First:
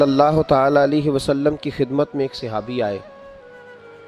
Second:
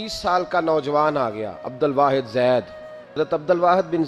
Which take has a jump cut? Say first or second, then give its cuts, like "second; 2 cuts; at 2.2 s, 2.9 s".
second; 1 cut; at 3.1 s